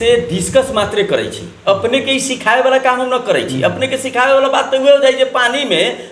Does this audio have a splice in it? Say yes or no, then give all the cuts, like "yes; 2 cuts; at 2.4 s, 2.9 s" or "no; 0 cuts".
no; 0 cuts